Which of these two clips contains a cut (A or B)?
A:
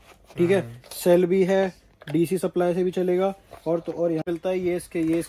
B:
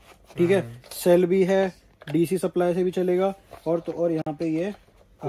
A